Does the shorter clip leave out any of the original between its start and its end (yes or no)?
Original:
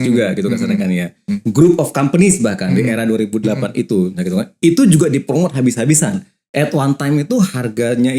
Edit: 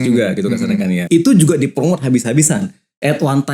yes